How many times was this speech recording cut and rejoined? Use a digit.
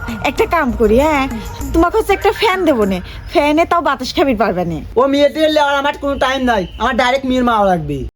1